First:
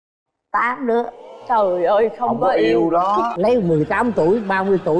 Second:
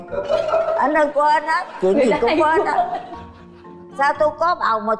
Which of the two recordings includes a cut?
first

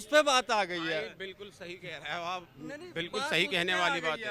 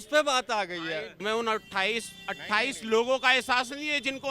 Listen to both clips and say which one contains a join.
second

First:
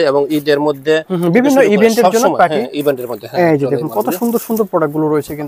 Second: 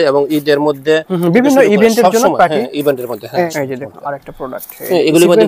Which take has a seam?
second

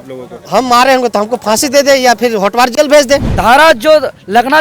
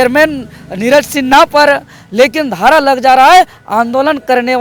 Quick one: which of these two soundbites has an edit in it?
first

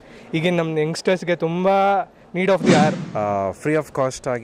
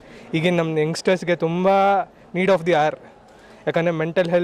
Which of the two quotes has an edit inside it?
first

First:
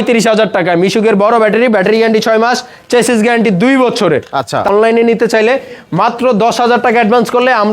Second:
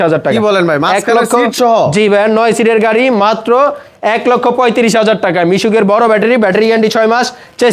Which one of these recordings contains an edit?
first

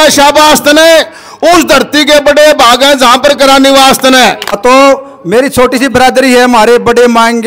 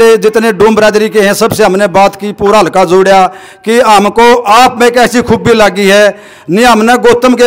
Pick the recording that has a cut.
first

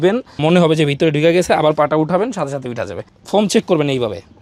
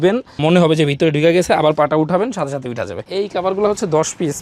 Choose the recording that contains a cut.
second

